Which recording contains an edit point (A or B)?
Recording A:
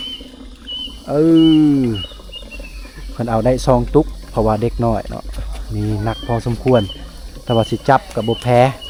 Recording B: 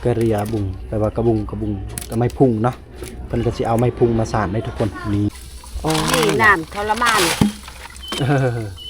B